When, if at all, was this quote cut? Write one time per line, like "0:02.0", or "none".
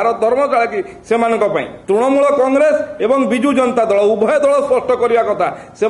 0:01.7